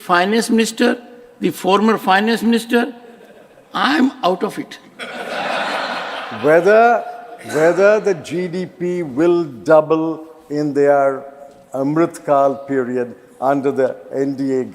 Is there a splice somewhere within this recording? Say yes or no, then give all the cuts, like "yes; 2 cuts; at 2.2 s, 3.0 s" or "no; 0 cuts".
no; 0 cuts